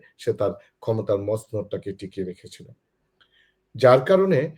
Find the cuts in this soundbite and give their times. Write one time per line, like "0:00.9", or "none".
none

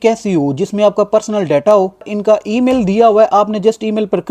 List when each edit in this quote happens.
0:02.1

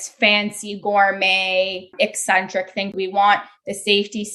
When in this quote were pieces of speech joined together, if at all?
0:01.9
0:02.9

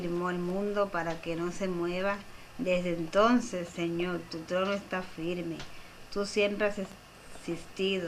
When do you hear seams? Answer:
none

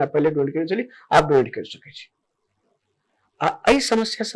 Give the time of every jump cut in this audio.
none

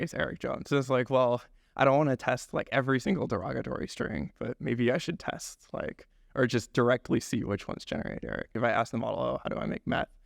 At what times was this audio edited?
0:08.6

